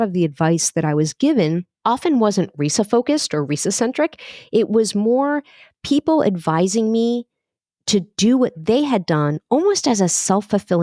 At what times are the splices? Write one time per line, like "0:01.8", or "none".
0:01.7